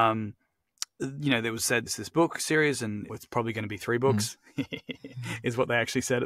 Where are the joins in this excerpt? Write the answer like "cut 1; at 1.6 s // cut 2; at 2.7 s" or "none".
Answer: cut 1; at 1.9 s // cut 2; at 3.1 s